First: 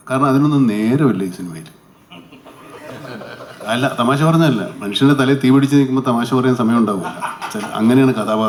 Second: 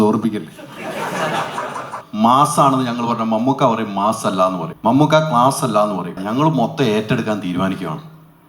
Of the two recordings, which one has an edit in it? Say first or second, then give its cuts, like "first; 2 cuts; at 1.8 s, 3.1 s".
second; 3 cuts; at 2.0 s, 4.7 s, 6.2 s